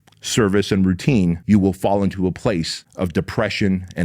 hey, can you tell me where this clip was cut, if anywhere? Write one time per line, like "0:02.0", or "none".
0:01.4
0:02.8